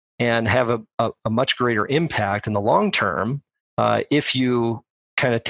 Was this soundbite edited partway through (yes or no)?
no